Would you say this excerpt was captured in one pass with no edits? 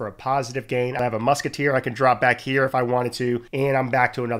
no; 2 cuts; at 1.0 s, 3.5 s

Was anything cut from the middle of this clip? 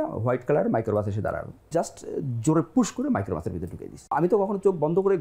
yes; 1 cut; at 3.9 s

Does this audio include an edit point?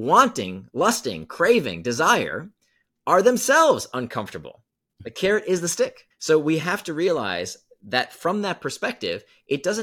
no; 0 cuts

